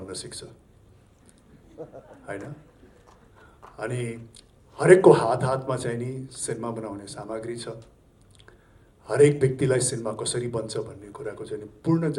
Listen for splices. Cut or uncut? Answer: uncut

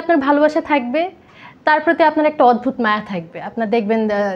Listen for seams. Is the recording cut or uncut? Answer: uncut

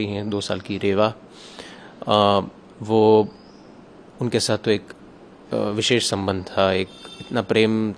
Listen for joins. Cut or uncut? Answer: uncut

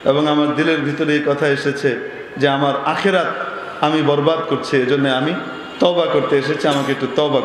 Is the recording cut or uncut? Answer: uncut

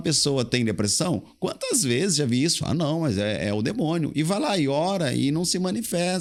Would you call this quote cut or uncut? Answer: uncut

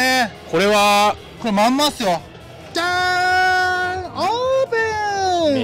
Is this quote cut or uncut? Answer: cut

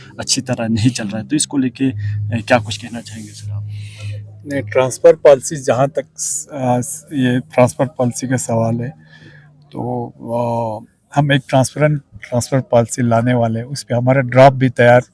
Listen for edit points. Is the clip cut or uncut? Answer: uncut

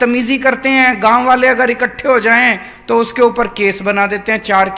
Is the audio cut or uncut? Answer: uncut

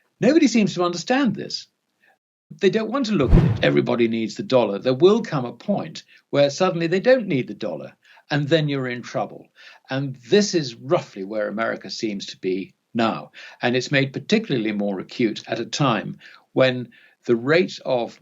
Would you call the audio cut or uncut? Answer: cut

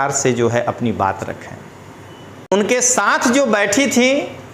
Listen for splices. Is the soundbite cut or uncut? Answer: cut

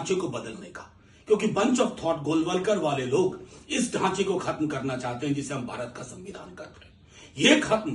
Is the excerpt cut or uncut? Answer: uncut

